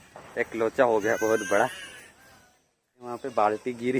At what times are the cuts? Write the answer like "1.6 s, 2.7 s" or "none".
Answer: 3.0 s